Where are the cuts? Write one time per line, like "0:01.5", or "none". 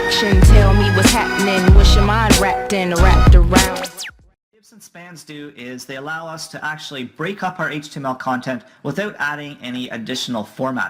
none